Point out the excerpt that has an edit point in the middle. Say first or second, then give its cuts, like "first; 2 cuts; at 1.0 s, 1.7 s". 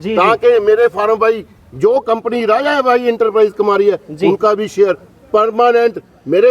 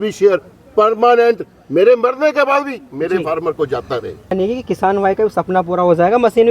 second; 1 cut; at 4.3 s